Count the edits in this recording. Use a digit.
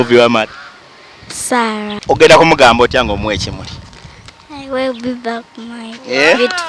1